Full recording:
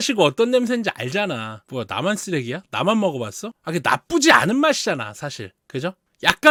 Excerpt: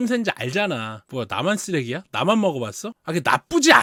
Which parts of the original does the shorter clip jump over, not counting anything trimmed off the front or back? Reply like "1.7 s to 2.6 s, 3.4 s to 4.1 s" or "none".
none